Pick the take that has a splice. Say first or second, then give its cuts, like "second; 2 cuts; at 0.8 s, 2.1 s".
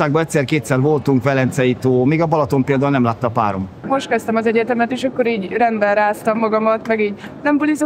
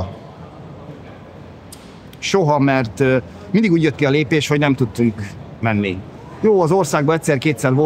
first; 1 cut; at 3.8 s